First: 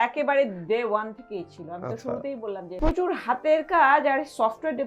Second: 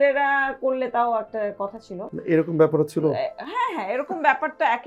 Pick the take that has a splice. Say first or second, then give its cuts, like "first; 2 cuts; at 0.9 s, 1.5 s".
first; 1 cut; at 2.8 s